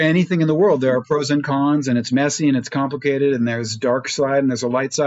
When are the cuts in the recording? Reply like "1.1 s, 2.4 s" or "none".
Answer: none